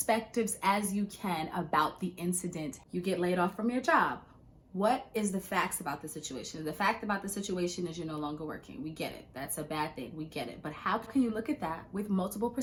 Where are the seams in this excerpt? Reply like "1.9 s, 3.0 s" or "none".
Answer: none